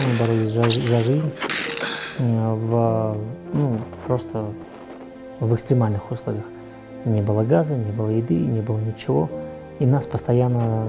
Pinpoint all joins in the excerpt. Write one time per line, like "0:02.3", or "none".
none